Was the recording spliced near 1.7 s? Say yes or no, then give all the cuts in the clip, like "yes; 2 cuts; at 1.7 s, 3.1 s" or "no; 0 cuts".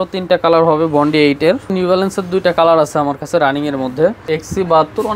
yes; 2 cuts; at 1.7 s, 4.2 s